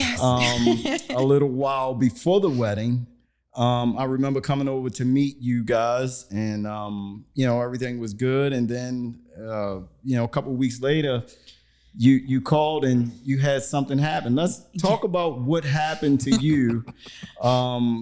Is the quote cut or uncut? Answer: uncut